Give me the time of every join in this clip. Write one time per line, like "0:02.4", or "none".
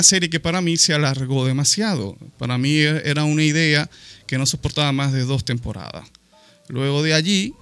none